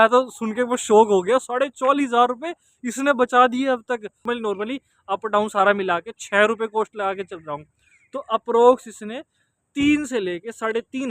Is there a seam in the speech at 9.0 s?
no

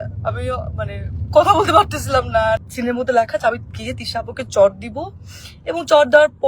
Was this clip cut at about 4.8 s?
no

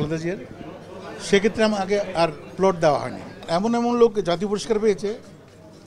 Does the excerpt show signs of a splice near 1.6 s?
no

